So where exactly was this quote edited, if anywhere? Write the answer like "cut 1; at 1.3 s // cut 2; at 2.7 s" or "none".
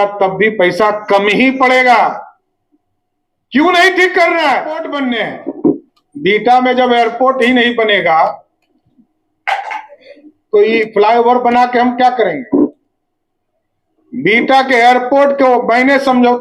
cut 1; at 4.9 s